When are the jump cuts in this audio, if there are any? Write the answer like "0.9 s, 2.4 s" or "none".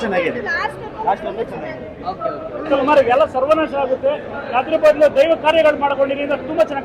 2.7 s